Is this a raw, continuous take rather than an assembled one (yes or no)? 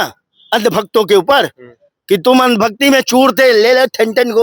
yes